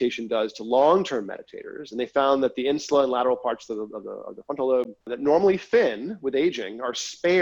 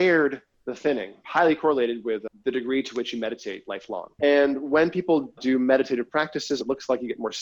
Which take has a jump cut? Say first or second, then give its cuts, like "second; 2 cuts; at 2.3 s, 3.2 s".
second; 5 cuts; at 1.2 s, 2.3 s, 4.1 s, 5.4 s, 6.6 s